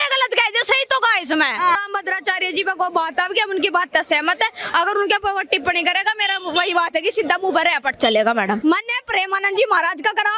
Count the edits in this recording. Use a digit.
2